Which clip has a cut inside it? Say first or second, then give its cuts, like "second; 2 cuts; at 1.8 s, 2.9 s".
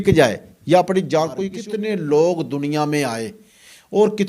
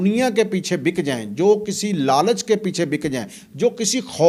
first; 1 cut; at 1.5 s